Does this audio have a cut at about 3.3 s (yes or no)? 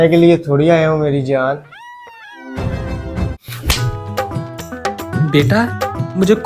yes